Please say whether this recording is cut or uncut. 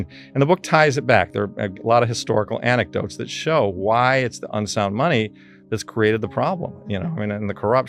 uncut